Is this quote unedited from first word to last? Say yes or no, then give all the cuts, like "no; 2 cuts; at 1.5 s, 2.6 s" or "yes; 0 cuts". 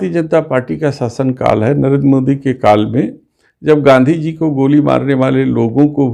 yes; 0 cuts